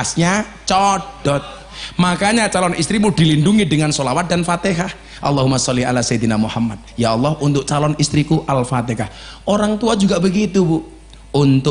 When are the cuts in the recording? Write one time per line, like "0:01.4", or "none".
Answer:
none